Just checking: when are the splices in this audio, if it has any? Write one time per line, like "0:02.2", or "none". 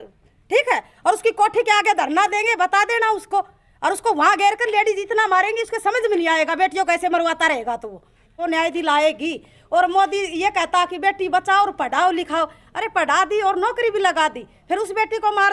0:08.3